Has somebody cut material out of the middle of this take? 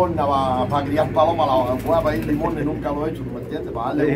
no; 0 cuts

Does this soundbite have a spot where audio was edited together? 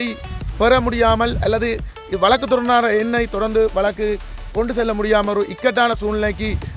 no; 0 cuts

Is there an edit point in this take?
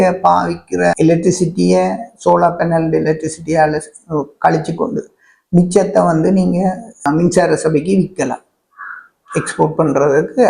yes; 2 cuts; at 0.9 s, 7.1 s

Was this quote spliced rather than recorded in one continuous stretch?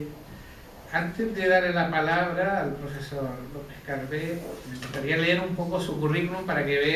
yes; 1 cut; at 1.3 s

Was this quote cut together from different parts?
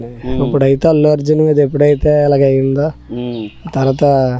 no; 0 cuts

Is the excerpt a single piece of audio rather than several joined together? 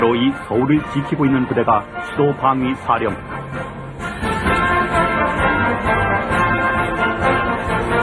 yes; 0 cuts

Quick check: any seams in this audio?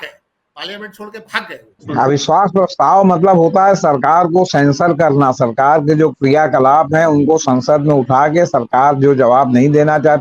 yes; 1 cut; at 1.8 s

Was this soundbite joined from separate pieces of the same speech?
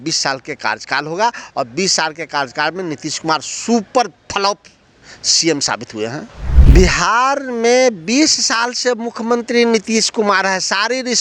yes; 1 cut; at 6.4 s

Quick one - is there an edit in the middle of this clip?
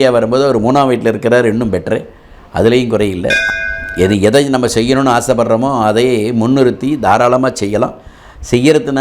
yes; 1 cut; at 3.4 s

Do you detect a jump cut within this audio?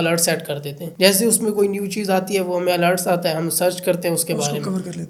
no; 0 cuts

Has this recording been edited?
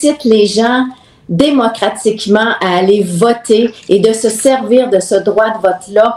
no; 0 cuts

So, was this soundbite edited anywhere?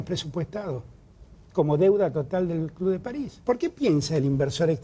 yes; 1 cut; at 3.3 s

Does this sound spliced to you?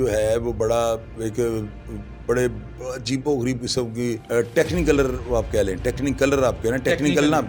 yes; 1 cut; at 4.2 s

